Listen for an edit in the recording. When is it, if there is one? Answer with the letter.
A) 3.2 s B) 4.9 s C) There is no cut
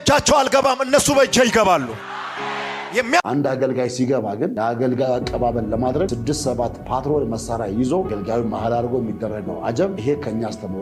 A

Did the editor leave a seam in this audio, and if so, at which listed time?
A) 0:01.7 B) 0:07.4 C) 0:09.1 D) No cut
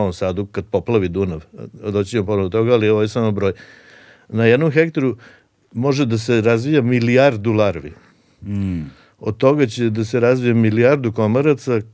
D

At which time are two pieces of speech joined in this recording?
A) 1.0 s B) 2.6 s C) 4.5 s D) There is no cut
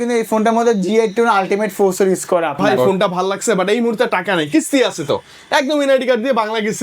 B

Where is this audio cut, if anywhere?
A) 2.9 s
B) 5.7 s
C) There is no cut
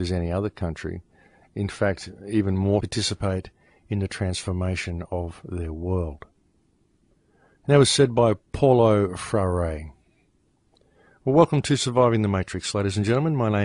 C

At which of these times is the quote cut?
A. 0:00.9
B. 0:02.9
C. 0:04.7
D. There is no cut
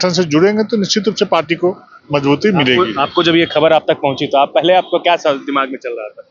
D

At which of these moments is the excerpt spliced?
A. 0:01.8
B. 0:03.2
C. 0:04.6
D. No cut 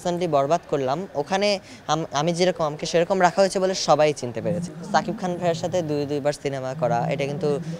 C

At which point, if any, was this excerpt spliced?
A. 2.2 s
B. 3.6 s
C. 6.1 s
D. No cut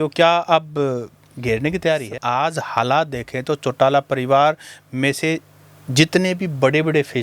A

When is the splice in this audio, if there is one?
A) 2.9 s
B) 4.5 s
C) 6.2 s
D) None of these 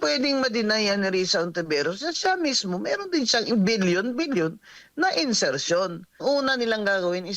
C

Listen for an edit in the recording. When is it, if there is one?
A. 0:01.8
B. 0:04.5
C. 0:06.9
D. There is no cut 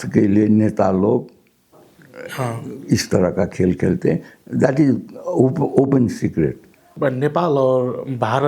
C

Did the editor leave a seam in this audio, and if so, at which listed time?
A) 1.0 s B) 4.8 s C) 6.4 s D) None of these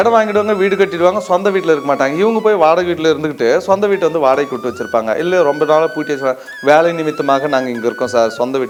D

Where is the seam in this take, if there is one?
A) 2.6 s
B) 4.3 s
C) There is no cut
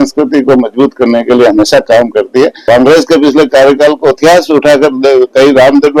A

